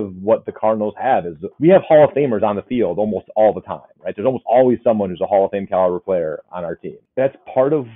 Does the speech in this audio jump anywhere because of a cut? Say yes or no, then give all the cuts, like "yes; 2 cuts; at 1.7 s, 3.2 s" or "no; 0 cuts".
yes; 2 cuts; at 1.4 s, 7.0 s